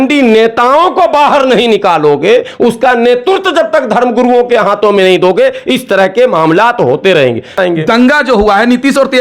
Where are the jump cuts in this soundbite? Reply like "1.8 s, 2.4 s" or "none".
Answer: 7.6 s